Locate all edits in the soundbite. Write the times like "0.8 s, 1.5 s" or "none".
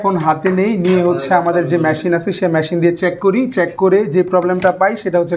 none